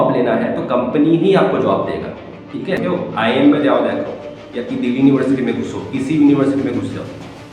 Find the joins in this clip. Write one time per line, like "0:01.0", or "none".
0:02.8